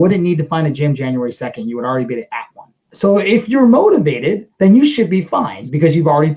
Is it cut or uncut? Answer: cut